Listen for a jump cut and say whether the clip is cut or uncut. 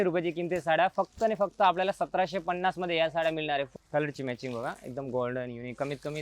cut